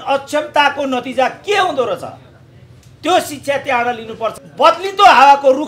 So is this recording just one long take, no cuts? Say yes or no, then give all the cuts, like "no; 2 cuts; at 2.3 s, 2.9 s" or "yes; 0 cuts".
no; 1 cut; at 4.3 s